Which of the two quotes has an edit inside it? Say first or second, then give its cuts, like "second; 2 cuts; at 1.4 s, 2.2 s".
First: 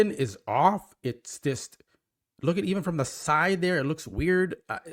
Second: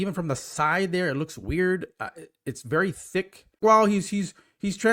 second; 1 cut; at 3.6 s